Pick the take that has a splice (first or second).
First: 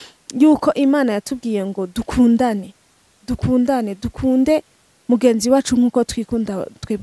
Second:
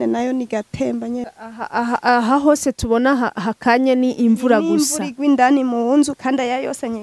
second